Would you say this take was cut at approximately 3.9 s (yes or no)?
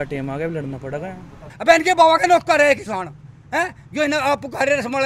no